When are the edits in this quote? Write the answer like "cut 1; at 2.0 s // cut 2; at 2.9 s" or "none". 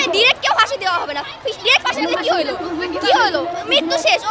none

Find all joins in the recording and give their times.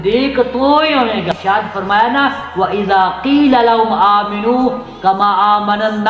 cut 1; at 1.3 s

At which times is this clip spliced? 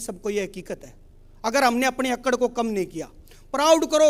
none

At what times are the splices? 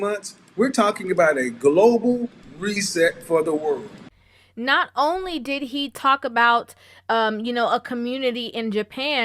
none

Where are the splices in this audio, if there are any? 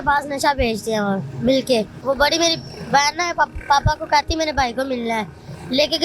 cut 1; at 1.9 s

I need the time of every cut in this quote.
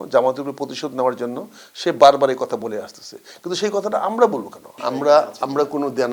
cut 1; at 4.8 s

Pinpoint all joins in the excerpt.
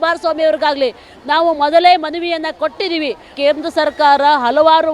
cut 1; at 3.3 s

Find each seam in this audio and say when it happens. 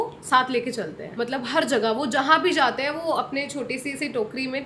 cut 1; at 1.0 s

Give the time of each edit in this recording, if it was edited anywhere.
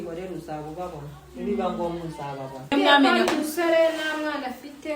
cut 1; at 2.7 s

